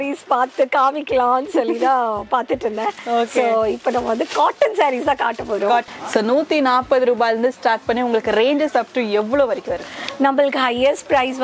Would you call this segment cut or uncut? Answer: cut